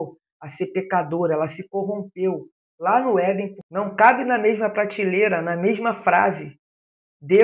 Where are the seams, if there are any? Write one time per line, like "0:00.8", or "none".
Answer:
0:03.6

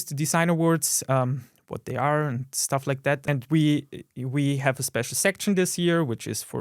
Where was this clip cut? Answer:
0:03.2

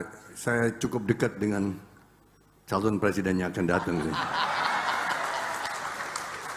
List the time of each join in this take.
none

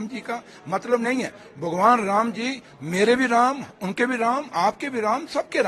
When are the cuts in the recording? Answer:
none

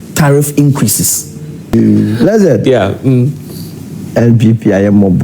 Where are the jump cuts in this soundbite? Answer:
0:01.7

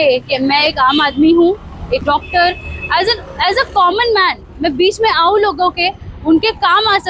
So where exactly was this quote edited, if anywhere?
0:02.0

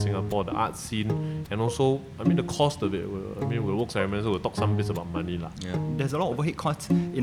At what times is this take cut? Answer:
0:05.9

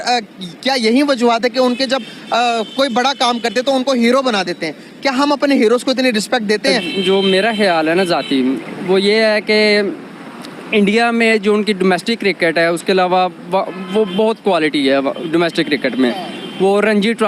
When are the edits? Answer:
0:06.8

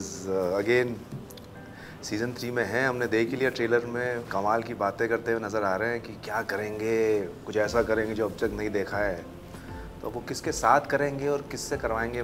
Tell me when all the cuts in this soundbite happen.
none

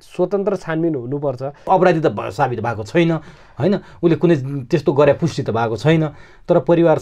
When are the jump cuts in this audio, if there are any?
0:01.7

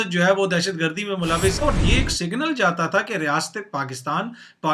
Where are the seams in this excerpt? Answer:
0:01.6

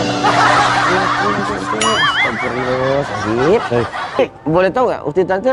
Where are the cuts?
0:04.2

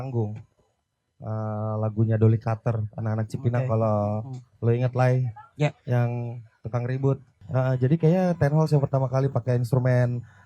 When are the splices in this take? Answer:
0:07.3

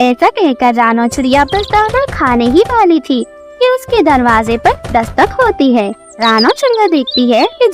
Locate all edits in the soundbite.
0:06.1

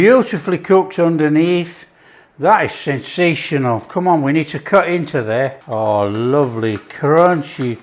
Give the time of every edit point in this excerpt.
0:05.6

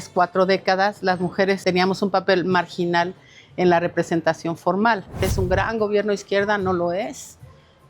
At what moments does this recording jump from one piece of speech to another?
0:01.6
0:05.3

